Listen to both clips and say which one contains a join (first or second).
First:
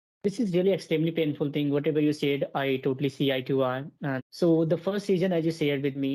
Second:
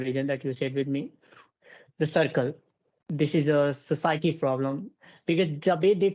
first